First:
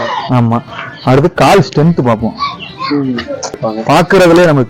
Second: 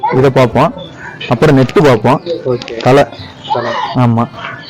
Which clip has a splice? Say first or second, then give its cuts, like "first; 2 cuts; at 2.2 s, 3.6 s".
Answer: first; 1 cut; at 3.6 s